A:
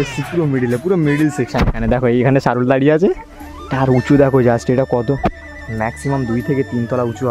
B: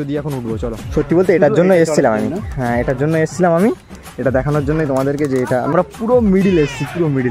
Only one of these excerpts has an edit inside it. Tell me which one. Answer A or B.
B